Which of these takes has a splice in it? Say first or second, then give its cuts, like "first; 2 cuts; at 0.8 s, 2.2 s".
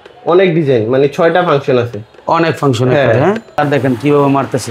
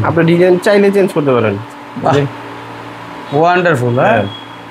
first; 1 cut; at 3.6 s